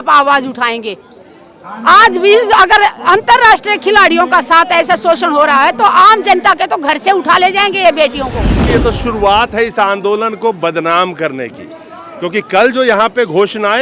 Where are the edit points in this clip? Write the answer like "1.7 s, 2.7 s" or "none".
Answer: 8.6 s